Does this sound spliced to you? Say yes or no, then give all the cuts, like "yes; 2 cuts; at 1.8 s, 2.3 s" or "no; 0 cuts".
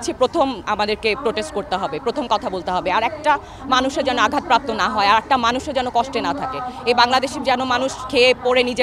no; 0 cuts